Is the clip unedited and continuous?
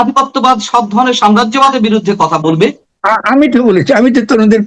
no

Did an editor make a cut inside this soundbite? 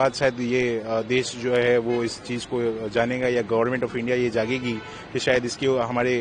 no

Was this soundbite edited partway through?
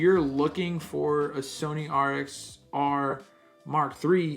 no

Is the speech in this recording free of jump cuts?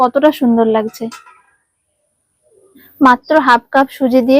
no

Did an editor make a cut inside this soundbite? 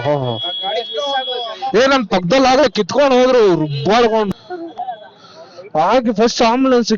yes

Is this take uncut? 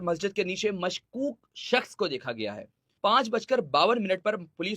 no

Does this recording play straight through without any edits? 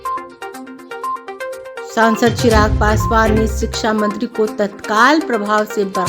no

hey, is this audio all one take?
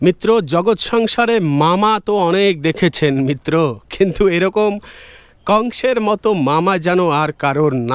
yes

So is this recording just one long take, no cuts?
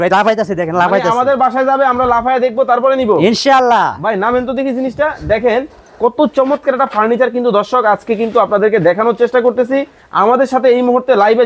yes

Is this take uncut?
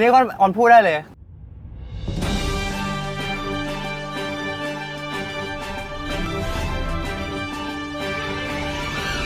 yes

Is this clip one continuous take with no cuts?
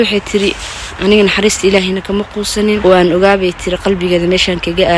no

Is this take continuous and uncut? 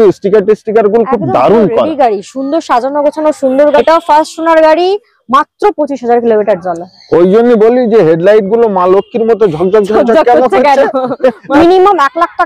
no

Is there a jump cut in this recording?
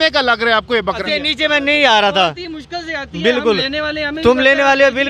yes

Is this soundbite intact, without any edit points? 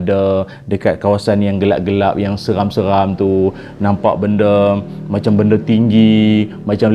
yes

